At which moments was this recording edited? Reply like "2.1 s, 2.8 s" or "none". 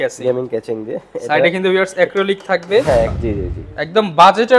3.2 s